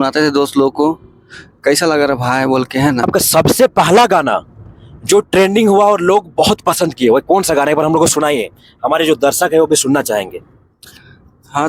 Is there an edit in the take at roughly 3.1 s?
yes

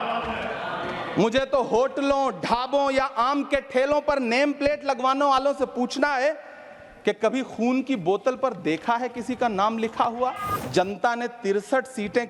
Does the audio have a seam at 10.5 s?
yes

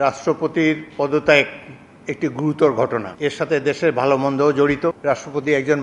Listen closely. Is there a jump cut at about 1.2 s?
no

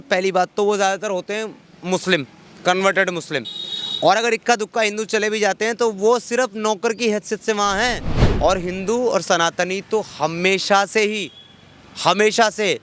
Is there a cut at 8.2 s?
yes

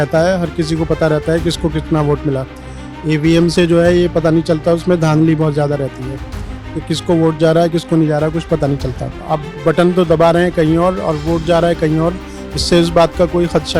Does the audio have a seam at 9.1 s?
yes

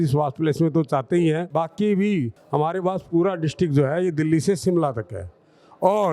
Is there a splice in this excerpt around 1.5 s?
yes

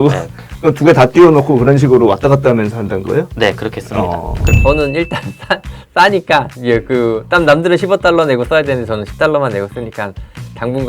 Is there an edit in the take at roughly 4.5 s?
yes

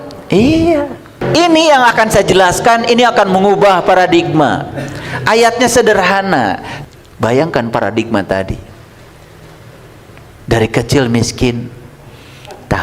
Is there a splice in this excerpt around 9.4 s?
no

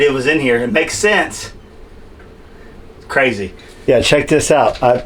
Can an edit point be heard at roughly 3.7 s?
yes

